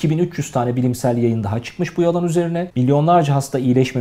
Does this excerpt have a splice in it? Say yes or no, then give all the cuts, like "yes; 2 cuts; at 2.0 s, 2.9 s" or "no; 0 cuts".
yes; 1 cut; at 2.7 s